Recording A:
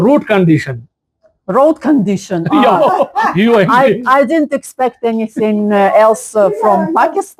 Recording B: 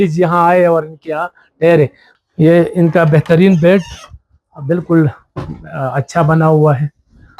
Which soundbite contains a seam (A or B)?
B